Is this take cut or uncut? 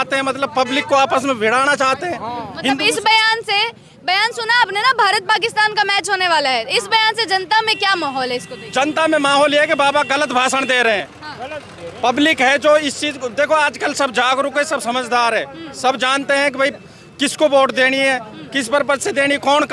uncut